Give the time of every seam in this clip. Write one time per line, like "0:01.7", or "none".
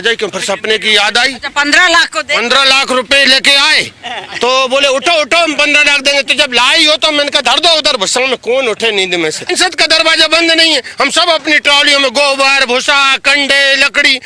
0:09.5